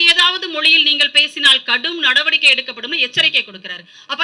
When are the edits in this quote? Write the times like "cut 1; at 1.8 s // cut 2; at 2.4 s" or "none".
none